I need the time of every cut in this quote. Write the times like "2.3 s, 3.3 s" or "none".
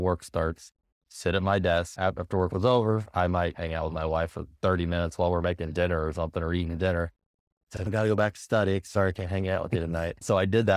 none